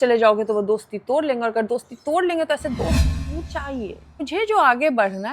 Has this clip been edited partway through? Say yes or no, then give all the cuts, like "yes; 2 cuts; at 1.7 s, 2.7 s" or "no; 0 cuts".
yes; 1 cut; at 4.3 s